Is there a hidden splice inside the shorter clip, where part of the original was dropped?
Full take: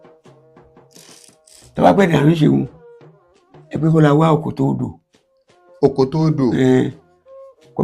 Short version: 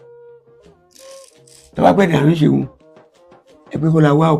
no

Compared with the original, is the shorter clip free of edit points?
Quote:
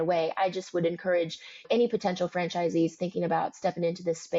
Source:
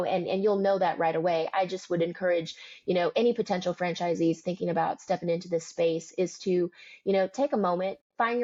no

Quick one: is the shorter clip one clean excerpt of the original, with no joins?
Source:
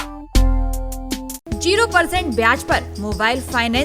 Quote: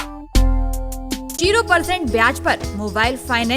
no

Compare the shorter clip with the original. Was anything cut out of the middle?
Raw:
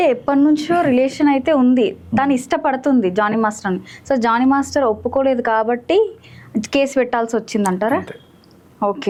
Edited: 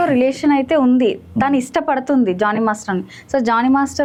no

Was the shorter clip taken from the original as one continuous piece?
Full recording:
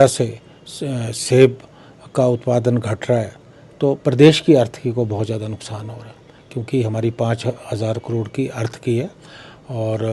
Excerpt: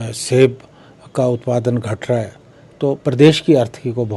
yes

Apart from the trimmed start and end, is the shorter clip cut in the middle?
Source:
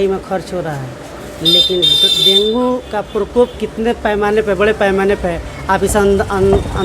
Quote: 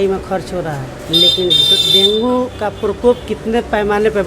yes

